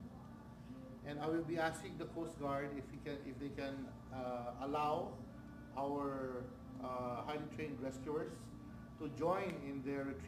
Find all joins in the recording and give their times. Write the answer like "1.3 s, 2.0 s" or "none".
none